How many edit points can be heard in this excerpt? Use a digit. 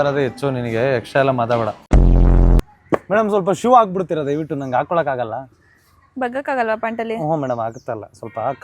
1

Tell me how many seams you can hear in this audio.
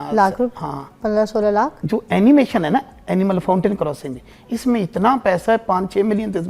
1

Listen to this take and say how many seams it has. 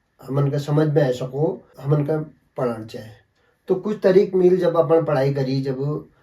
1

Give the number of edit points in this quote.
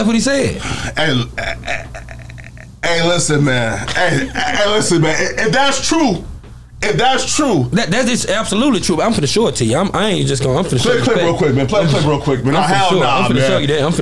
0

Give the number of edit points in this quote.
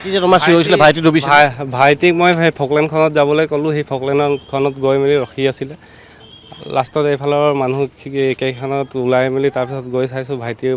0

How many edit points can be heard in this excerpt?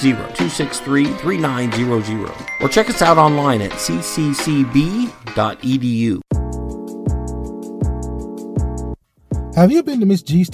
1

